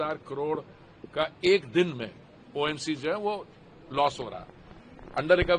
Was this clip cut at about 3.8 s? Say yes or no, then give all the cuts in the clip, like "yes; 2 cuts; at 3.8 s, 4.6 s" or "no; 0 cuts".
no; 0 cuts